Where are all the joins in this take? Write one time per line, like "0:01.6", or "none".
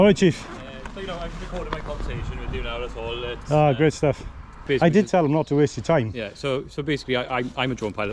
0:04.6